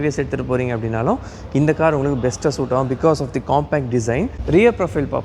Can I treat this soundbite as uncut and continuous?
yes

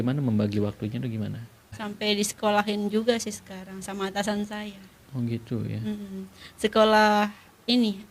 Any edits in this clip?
yes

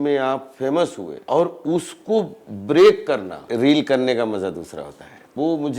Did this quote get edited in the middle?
yes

